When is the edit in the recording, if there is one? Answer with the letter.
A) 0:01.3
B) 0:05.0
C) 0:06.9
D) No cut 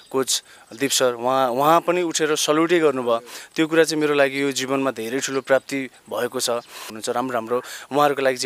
C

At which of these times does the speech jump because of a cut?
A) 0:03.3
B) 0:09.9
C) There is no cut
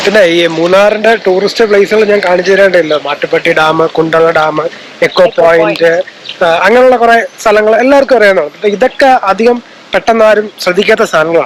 C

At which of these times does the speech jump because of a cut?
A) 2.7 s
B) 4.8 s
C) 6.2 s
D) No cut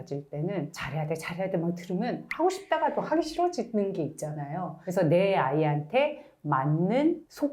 B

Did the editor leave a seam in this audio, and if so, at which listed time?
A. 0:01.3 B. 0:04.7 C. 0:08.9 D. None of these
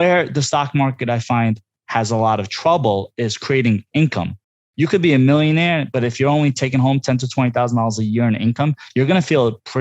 B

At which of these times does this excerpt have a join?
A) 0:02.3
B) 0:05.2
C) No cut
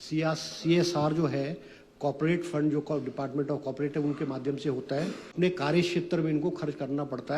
B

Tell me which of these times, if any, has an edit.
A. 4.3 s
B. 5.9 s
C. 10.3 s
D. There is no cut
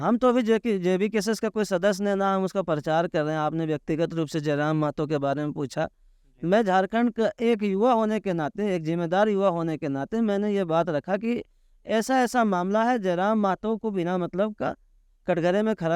D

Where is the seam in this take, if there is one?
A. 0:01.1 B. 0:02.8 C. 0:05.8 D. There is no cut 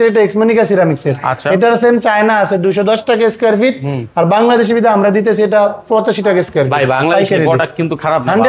D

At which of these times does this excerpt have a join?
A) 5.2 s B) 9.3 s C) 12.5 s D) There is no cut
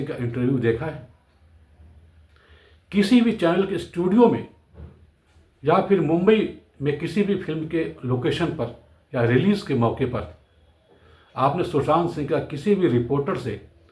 D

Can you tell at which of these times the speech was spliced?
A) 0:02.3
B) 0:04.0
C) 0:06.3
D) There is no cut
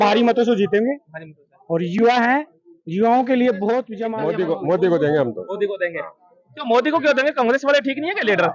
B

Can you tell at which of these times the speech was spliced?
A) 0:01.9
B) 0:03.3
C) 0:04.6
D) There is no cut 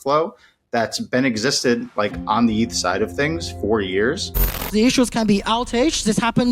C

